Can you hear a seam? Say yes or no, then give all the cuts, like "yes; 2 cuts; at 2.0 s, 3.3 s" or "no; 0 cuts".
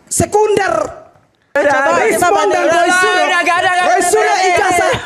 yes; 1 cut; at 1.5 s